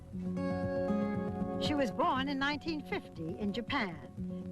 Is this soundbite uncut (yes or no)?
no